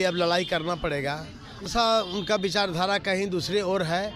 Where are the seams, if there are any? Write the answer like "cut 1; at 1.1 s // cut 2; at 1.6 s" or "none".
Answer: cut 1; at 1.7 s